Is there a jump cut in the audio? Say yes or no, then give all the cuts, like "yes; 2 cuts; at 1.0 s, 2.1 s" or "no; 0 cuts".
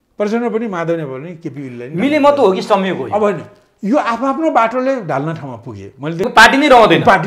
yes; 1 cut; at 6.3 s